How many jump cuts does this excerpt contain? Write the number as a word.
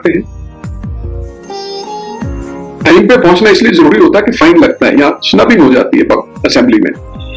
zero